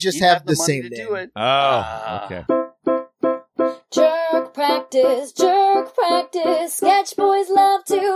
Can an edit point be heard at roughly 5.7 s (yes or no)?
no